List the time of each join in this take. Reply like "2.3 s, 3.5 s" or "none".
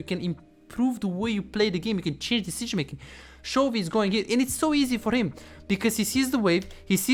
none